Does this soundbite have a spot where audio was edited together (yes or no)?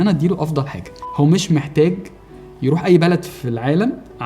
yes